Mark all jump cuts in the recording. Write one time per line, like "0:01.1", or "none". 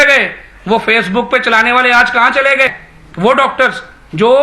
0:02.9